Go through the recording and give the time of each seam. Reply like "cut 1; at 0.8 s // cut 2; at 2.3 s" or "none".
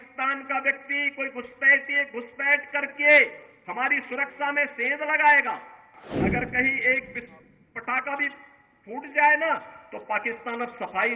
cut 1; at 6.0 s